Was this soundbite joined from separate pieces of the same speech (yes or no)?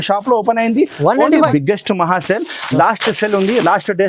yes